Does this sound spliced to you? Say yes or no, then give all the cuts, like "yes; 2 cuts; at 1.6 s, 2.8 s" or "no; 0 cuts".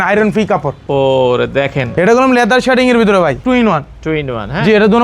yes; 2 cuts; at 1.9 s, 3.4 s